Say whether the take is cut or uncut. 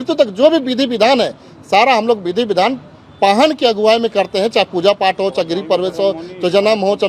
uncut